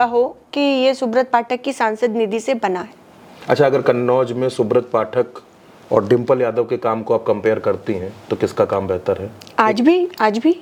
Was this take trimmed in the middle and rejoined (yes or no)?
no